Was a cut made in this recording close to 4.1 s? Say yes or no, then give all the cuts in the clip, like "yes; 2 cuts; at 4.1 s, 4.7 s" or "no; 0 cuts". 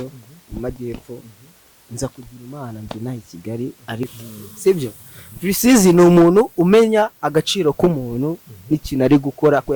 yes; 1 cut; at 4.1 s